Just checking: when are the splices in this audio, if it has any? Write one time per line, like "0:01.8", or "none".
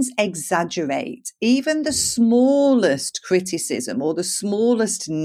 none